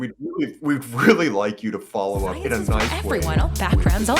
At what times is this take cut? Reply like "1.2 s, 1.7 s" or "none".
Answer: 3.1 s